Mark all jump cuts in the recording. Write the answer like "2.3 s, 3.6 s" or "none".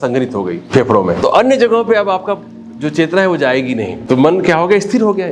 1.0 s, 4.0 s